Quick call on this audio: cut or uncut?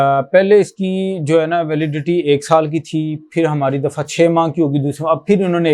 uncut